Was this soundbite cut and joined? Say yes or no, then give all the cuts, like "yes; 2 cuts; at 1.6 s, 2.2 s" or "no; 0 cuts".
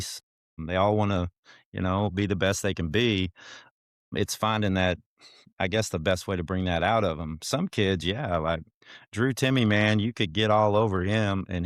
no; 0 cuts